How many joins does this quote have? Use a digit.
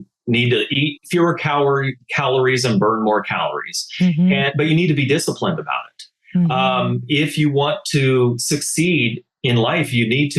0